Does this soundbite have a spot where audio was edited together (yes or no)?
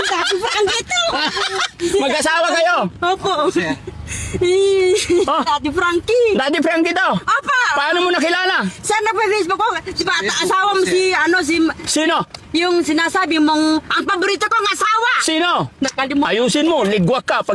no